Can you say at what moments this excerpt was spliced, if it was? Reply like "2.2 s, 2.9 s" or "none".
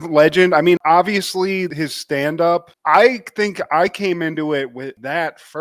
none